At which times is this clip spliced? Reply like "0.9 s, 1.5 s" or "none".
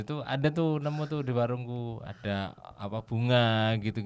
2.1 s

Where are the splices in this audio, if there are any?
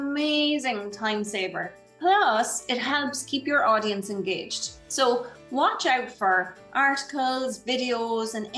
none

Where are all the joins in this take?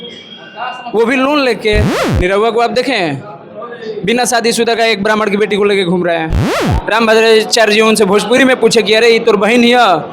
2.0 s, 6.6 s

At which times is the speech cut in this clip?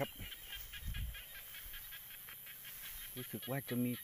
none

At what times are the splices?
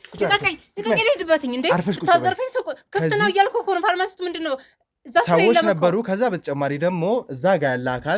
none

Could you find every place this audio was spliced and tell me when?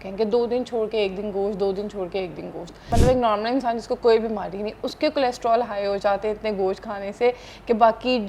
2.9 s

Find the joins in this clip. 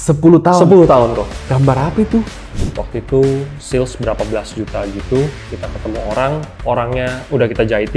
2.4 s, 6.5 s

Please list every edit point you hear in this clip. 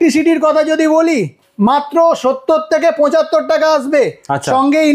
none

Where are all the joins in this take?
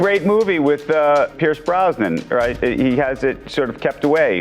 1.3 s

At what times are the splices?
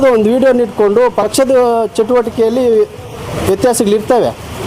1.2 s

